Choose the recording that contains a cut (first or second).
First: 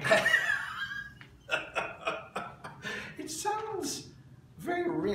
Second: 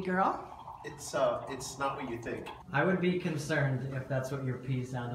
second